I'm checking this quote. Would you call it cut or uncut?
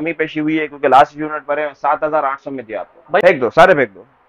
cut